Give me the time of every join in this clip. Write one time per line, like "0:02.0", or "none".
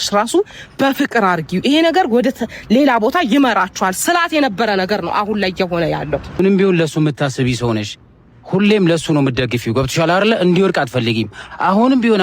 0:06.4